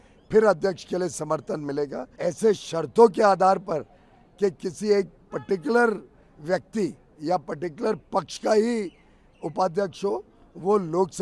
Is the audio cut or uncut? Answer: cut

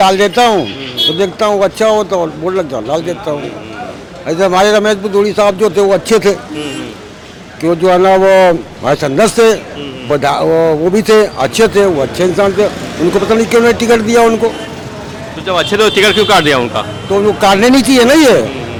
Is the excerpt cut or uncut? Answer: uncut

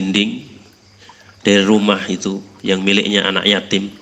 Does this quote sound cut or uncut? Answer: uncut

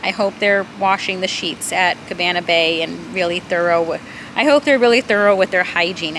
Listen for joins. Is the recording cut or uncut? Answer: uncut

